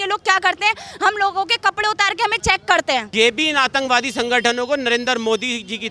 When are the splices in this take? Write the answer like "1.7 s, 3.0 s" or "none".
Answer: 3.1 s